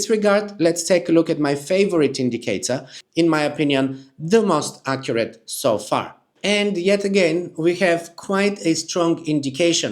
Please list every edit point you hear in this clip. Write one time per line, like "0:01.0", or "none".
0:03.0
0:06.3